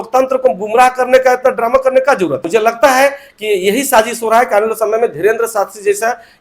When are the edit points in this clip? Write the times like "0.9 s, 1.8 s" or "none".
2.4 s